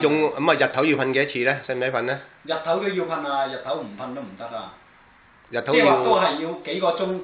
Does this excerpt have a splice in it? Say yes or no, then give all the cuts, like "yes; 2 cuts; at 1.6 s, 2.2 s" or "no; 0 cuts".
yes; 1 cut; at 3.4 s